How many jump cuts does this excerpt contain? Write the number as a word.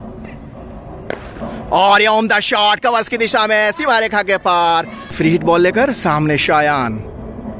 one